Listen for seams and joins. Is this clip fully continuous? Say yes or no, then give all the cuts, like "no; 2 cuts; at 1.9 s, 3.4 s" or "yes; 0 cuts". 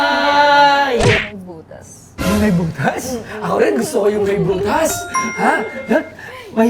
no; 1 cut; at 1.2 s